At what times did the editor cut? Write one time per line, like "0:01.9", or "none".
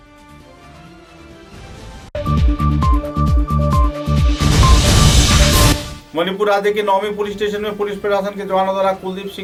none